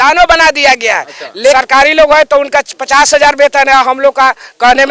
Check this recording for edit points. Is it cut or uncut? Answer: cut